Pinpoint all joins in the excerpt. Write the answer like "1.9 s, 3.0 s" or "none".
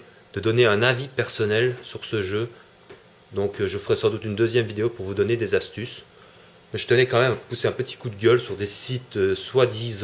2.7 s